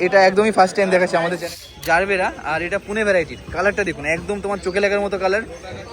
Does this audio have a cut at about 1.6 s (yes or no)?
yes